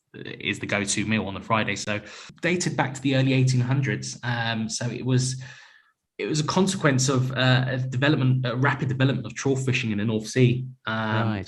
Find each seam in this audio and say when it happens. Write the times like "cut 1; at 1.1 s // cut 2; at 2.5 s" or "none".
cut 1; at 2.2 s